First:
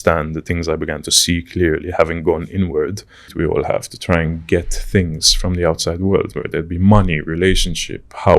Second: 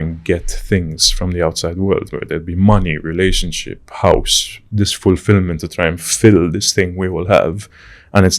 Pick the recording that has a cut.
first; 1 cut; at 3.3 s

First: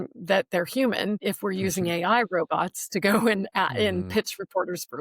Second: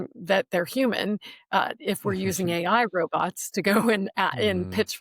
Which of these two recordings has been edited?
first; 1 cut; at 1.2 s

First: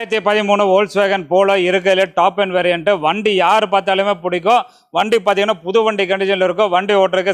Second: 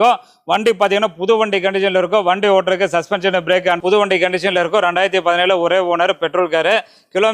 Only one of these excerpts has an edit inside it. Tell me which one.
second; 1 cut; at 3.8 s

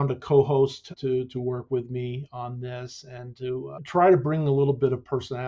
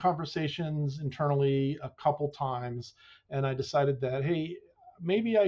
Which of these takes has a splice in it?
first; 2 cuts; at 0.9 s, 3.8 s

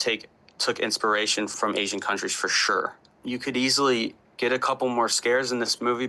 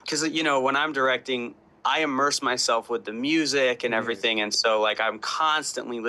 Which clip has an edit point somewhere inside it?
first; 1 cut; at 3.1 s

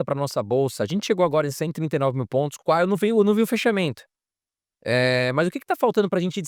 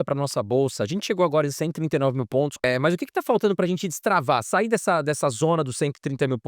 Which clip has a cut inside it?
second; 1 cut; at 2.6 s

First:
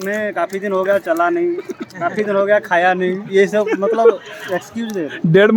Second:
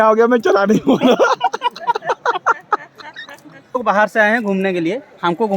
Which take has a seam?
second; 1 cut; at 3.7 s

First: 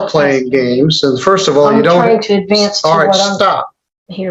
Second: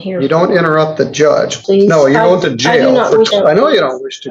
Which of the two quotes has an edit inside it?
second; 2 cuts; at 1.6 s, 3.3 s

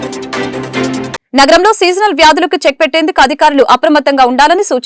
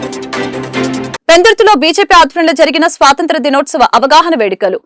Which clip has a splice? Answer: first; 1 cut; at 1.2 s

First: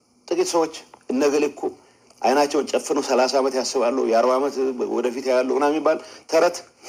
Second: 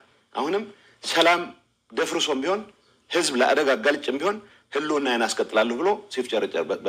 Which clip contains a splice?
second; 1 cut; at 5.8 s

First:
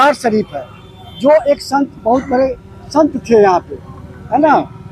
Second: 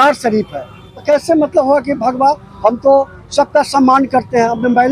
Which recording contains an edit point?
second; 1 cut; at 0.9 s

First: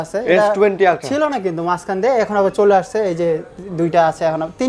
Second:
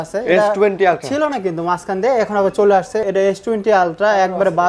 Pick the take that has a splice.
second; 1 cut; at 3.0 s

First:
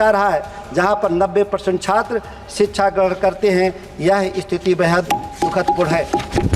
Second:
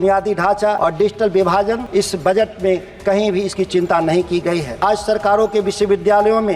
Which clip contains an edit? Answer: second; 3 cuts; at 0.8 s, 1.8 s, 4.8 s

